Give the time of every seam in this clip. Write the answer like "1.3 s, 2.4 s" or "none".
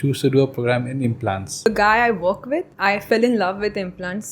1.7 s, 2.7 s